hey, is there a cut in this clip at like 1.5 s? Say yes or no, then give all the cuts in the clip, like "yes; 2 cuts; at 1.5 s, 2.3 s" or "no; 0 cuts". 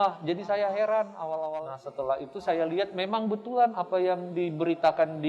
yes; 1 cut; at 1.5 s